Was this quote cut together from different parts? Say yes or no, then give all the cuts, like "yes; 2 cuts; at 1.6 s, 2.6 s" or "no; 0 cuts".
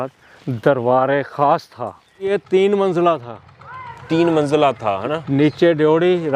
yes; 1 cut; at 2.3 s